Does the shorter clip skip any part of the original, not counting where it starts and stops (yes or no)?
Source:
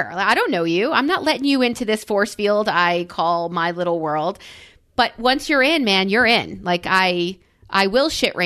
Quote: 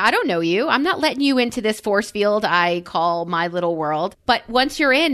yes